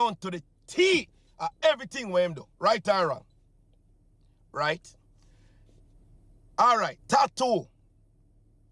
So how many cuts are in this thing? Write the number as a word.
zero